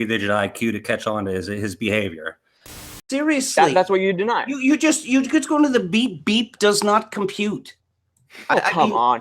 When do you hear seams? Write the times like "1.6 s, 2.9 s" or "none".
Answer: 3.0 s